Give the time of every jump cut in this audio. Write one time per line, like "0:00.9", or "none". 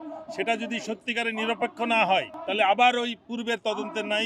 0:02.4